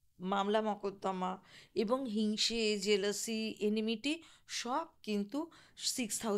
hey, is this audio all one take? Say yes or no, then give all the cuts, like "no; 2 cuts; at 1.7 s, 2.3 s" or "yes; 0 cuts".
yes; 0 cuts